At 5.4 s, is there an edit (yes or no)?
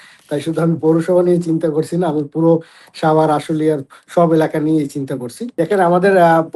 yes